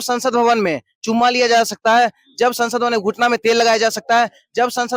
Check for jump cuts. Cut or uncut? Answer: uncut